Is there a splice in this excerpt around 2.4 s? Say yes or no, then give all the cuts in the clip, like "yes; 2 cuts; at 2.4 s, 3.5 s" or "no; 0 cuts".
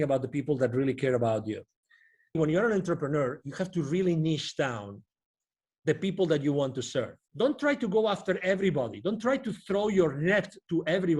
yes; 2 cuts; at 2.4 s, 7.2 s